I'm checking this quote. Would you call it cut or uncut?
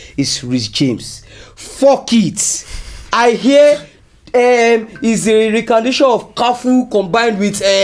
uncut